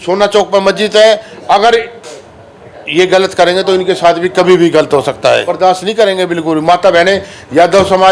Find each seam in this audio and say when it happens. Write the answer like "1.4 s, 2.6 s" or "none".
5.5 s